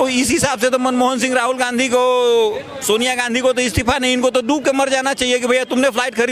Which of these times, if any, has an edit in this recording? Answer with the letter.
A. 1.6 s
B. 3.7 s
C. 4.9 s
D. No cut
D